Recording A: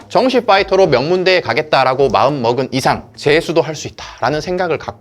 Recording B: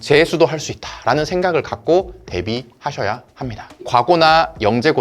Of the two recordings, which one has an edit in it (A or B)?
B